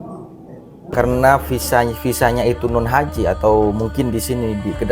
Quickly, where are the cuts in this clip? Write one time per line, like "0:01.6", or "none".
0:00.9